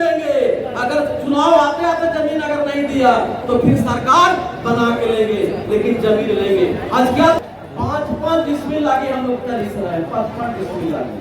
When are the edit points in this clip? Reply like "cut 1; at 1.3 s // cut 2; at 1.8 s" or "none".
cut 1; at 7.4 s